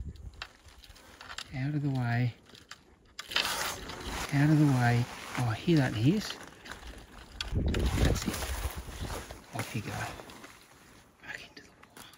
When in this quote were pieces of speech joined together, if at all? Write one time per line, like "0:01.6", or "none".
0:07.5